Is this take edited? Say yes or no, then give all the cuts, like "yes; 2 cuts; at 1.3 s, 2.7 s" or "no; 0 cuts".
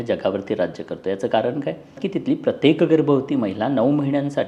yes; 1 cut; at 2.0 s